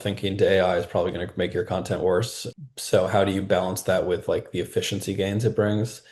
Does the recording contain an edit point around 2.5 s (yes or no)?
no